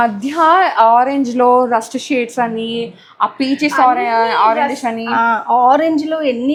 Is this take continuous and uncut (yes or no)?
yes